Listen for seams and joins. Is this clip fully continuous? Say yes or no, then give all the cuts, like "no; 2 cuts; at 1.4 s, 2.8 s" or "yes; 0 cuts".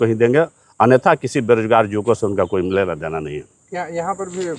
yes; 0 cuts